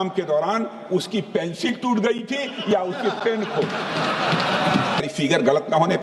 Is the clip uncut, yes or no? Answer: no